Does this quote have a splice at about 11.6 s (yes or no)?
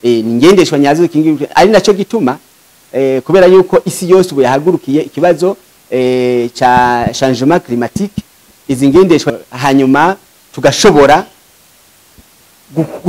no